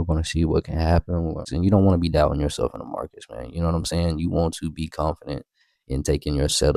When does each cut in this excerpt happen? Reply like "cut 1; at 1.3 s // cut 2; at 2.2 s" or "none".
cut 1; at 1.4 s